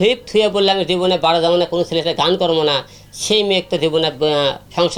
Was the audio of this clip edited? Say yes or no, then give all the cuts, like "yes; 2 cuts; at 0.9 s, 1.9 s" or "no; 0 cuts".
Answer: no; 0 cuts